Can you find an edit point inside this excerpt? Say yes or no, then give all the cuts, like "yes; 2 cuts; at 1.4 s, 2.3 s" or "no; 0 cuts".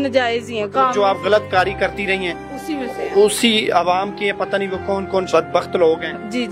yes; 1 cut; at 5.3 s